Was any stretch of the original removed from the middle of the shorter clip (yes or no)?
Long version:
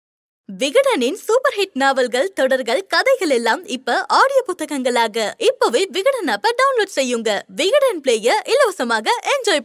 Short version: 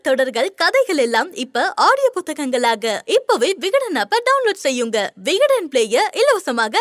no